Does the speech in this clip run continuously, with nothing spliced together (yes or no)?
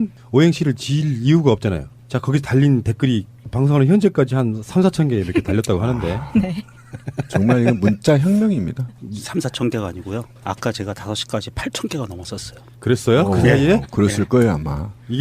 no